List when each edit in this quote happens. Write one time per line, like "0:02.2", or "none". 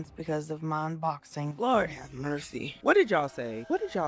none